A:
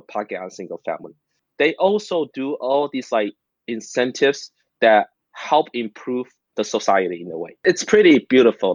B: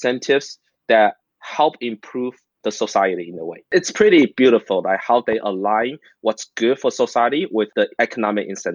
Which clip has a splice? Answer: B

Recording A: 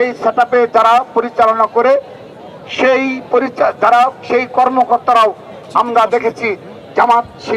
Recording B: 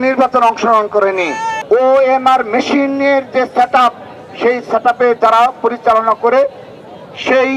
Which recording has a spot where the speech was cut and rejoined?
B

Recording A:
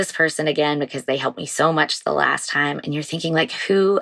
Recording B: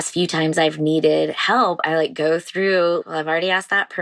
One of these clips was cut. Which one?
B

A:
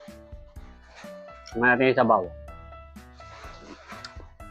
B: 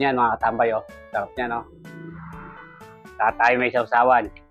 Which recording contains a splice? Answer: A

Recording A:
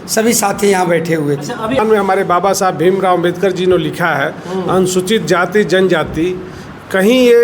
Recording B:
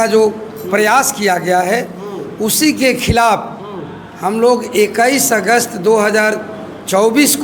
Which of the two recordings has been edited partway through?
A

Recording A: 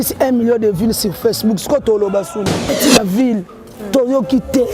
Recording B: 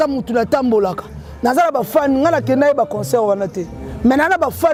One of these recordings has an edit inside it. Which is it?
A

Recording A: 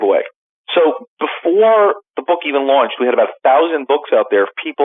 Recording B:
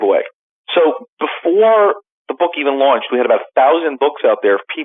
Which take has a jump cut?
A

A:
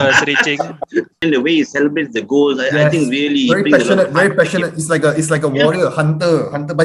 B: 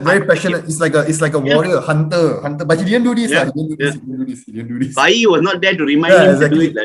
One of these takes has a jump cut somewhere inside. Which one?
A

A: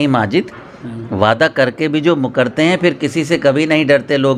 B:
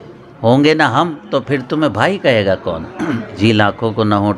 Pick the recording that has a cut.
B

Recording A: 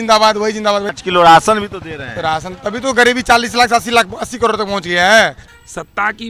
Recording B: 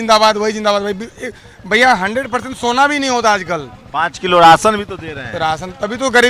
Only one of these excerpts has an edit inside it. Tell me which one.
A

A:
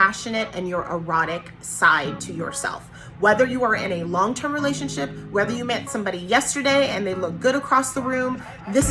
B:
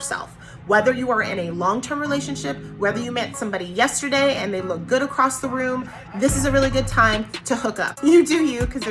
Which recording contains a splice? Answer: B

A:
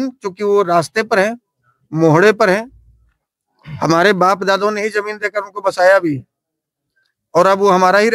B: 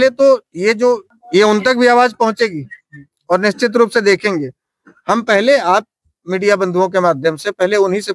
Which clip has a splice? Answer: B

